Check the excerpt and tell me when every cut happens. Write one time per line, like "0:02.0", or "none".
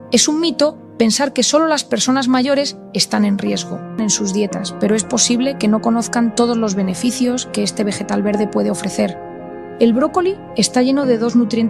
0:04.0